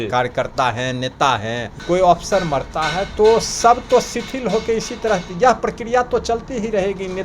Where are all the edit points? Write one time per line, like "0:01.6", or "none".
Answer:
0:01.7